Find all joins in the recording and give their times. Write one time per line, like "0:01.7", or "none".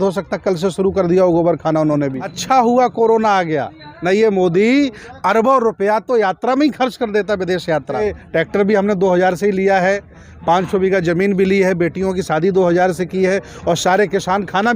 0:02.3
0:08.0